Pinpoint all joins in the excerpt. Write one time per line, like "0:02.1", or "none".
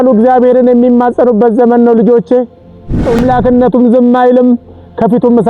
0:03.2